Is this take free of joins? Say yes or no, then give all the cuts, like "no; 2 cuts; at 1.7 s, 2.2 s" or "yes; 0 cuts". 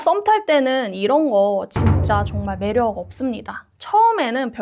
yes; 0 cuts